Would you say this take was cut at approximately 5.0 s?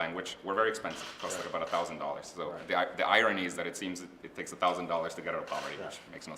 no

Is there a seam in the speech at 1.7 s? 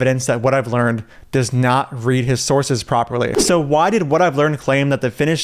no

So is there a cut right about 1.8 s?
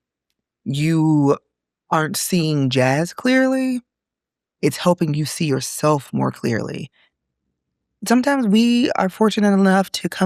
no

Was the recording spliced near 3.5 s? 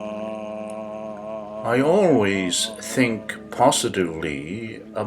no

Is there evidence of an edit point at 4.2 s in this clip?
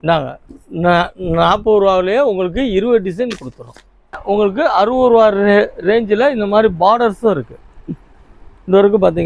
yes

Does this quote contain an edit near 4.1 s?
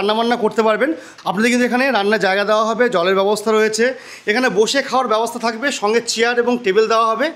no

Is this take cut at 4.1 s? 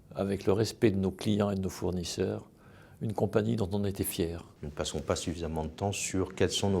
no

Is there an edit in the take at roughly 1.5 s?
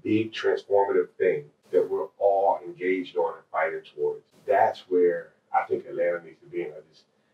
yes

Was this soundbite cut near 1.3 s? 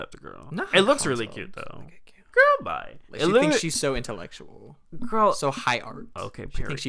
no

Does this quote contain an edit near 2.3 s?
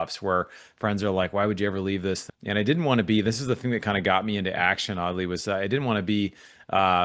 yes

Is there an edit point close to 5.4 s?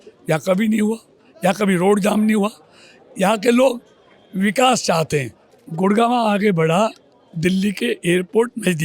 yes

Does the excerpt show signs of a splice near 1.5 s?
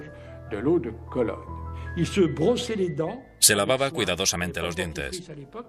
yes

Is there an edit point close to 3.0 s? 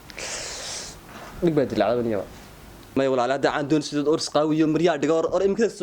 yes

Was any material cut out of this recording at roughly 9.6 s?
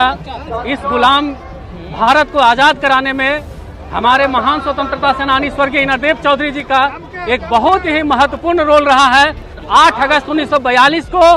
yes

